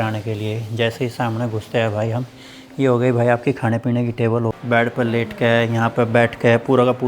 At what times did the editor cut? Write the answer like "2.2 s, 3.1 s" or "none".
4.5 s